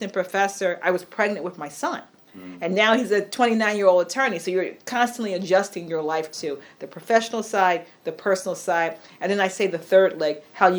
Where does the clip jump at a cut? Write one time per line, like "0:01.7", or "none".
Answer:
none